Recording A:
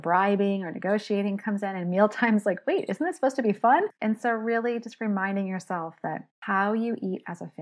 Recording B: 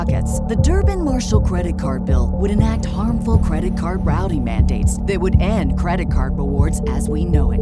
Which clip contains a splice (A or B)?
A